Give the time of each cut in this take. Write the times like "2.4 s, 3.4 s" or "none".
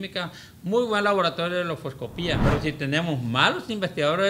2.4 s